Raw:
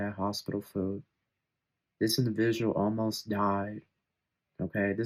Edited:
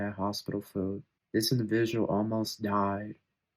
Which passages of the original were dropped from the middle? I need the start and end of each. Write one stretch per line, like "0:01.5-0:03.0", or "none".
0:01.1-0:01.8